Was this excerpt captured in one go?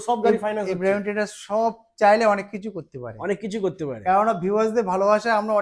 yes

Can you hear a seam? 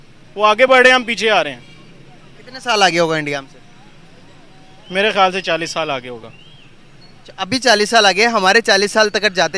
no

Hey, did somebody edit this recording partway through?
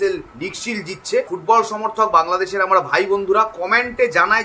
yes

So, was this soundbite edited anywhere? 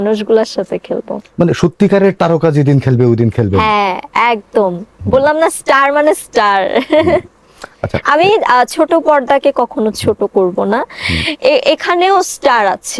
no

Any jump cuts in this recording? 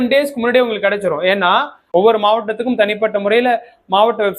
yes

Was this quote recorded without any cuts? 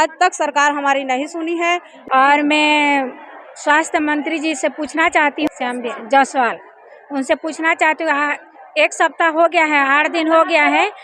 no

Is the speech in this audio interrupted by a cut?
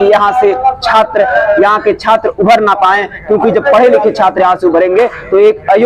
no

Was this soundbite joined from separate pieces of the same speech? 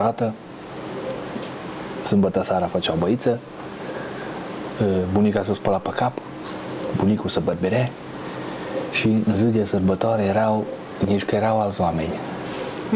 no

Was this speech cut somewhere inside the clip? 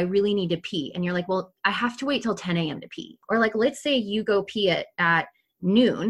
yes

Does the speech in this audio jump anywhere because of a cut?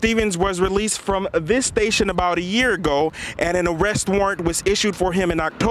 no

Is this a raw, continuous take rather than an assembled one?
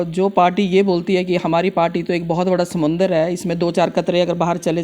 yes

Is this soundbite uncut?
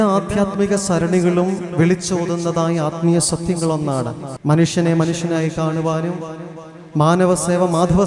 no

